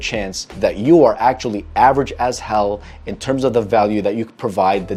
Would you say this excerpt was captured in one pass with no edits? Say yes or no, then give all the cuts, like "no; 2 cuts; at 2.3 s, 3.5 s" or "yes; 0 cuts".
yes; 0 cuts